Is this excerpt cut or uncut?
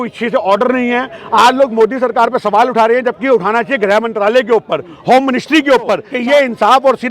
cut